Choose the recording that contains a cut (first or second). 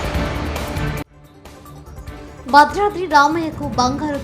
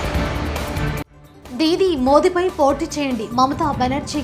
first